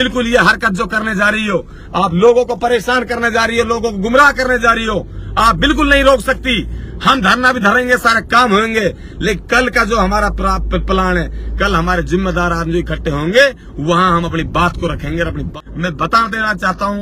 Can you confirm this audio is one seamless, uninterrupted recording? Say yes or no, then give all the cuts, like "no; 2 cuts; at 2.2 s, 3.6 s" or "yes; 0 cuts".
no; 1 cut; at 15.5 s